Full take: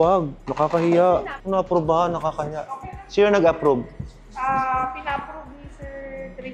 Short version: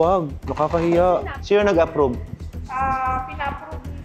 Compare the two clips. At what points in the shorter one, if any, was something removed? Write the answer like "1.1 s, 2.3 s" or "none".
1.3 s